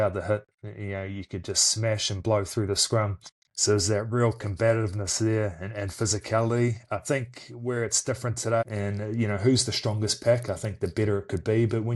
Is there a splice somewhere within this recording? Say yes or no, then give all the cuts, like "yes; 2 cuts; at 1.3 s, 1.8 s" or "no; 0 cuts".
yes; 1 cut; at 8.6 s